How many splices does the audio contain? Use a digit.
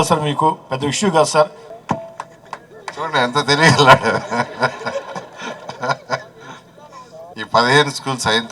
2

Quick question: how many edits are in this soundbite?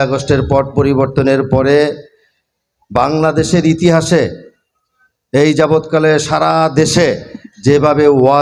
0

